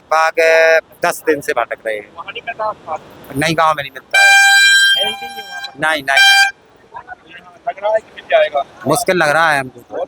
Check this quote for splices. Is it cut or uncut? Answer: uncut